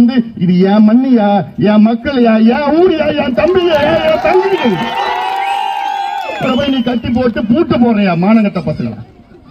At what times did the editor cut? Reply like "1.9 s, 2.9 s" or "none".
none